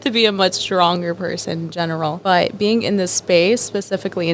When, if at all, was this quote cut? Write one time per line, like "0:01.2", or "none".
0:02.2